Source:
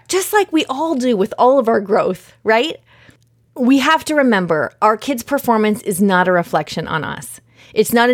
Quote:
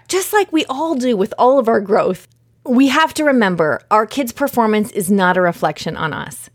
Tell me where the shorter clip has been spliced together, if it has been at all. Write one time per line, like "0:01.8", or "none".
0:02.3